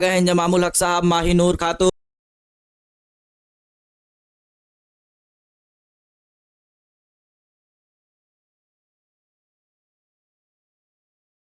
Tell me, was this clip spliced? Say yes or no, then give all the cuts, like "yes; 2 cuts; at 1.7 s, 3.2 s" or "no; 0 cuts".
no; 0 cuts